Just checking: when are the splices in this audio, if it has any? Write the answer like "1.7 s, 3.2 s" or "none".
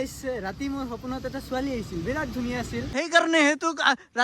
3.1 s